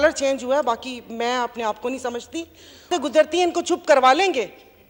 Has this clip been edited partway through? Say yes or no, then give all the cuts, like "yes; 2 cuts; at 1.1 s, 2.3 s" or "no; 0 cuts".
yes; 1 cut; at 2.9 s